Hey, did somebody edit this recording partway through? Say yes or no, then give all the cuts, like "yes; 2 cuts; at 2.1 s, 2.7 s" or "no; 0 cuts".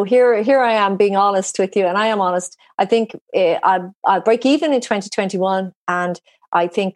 no; 0 cuts